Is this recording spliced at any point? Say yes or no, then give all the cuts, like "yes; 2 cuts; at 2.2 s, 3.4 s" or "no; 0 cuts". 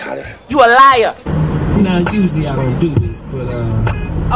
yes; 1 cut; at 1.2 s